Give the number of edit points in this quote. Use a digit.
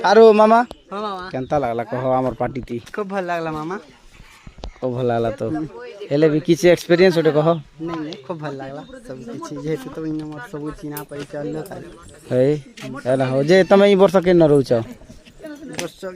0